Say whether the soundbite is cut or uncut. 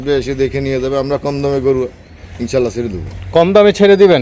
uncut